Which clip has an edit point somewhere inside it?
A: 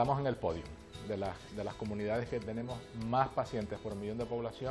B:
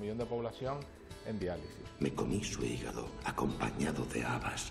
B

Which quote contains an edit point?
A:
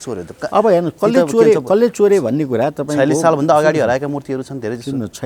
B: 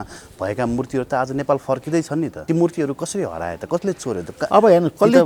B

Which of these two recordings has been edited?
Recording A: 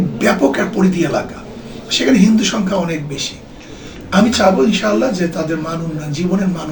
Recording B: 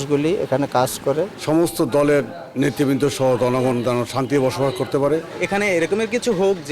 B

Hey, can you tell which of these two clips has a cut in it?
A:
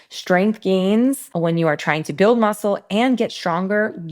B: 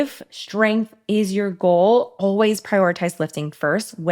A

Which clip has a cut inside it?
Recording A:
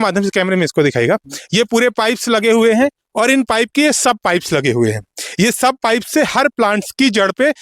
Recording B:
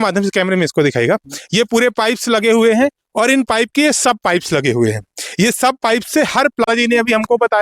B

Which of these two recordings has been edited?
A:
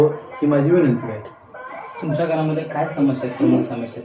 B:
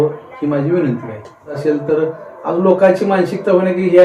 B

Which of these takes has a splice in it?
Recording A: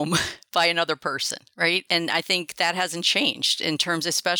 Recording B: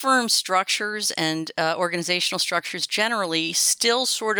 A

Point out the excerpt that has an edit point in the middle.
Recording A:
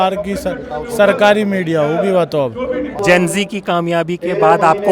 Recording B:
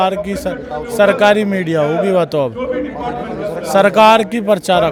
A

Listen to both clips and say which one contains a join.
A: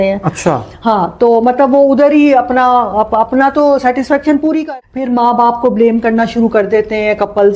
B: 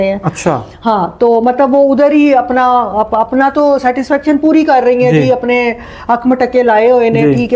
A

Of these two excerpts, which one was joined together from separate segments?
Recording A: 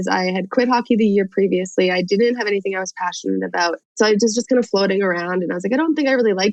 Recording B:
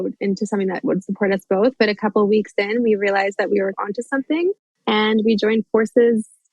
B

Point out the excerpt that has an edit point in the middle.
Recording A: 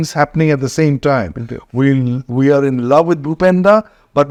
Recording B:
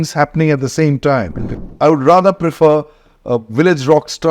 B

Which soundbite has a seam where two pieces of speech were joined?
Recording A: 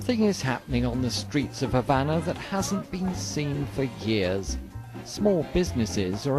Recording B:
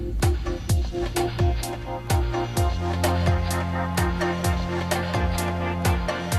B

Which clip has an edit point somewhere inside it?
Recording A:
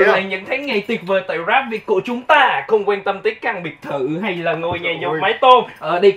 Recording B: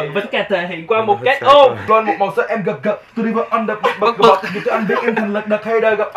B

